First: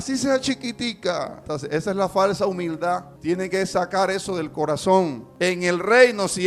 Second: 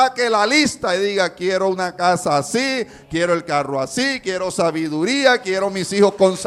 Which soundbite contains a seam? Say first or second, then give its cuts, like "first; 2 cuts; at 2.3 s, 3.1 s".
first; 3 cuts; at 1.4 s, 3.1 s, 5.2 s